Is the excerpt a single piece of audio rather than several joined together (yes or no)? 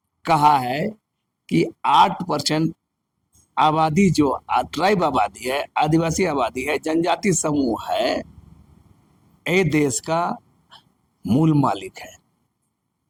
yes